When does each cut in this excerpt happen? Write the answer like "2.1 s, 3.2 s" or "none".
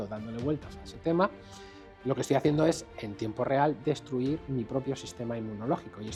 none

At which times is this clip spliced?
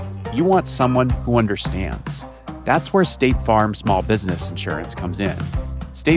none

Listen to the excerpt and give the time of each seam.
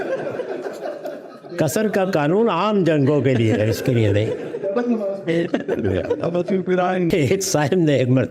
7.1 s

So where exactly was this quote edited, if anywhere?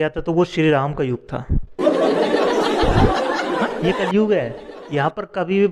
none

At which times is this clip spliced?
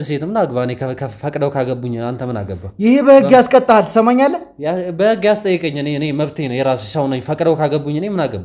none

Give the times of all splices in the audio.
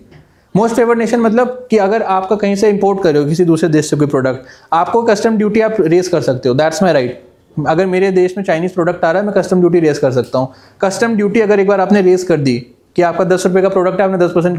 none

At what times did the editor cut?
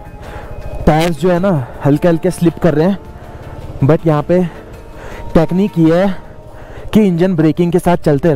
none

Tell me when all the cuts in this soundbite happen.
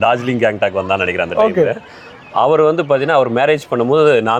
none

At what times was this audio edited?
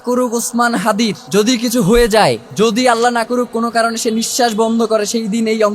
1.2 s, 2.5 s

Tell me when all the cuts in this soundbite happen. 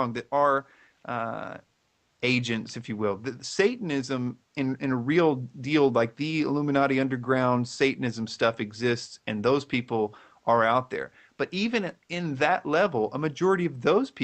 none

